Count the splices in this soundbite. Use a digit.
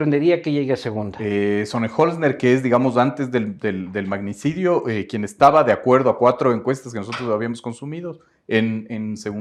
0